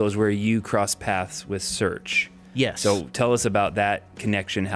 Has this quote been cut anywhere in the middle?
no; 0 cuts

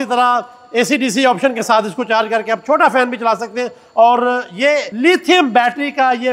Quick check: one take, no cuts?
no; 1 cut; at 4.9 s

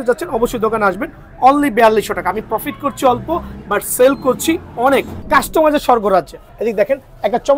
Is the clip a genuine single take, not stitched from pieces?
no; 2 cuts; at 5.1 s, 6.4 s

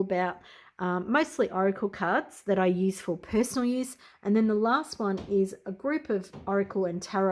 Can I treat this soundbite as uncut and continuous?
yes; 0 cuts

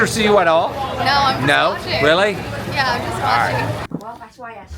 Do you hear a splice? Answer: yes; 1 cut; at 3.8 s

